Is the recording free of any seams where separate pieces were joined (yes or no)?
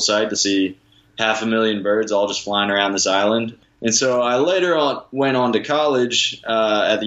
no